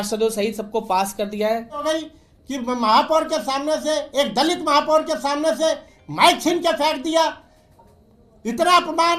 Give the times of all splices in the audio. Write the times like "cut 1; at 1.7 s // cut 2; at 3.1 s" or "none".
cut 1; at 1.8 s